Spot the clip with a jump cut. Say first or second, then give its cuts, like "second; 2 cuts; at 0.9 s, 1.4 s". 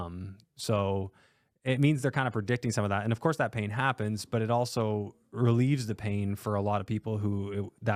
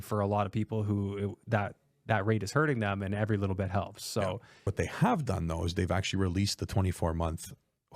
second; 1 cut; at 4.7 s